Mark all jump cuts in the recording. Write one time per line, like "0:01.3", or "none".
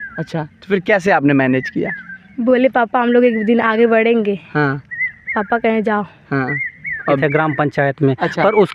0:07.2